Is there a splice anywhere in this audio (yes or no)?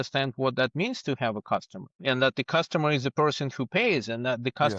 no